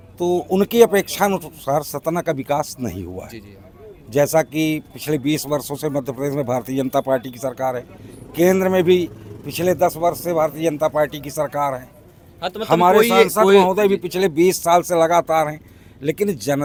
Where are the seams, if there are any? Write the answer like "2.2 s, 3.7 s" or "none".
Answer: none